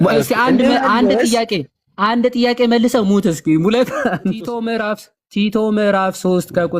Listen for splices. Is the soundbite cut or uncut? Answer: cut